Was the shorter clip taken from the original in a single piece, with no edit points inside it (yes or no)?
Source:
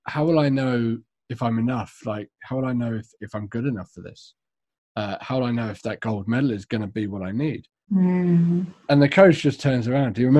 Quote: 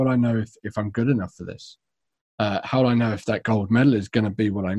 yes